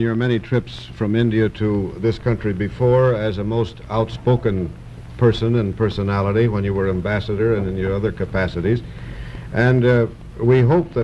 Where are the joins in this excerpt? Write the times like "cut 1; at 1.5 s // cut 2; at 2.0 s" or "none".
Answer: none